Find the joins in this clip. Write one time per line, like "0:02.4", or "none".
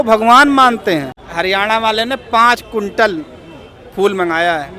0:01.2